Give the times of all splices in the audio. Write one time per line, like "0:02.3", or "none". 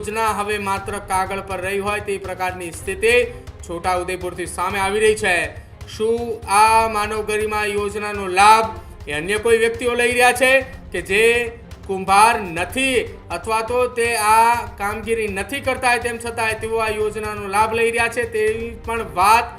none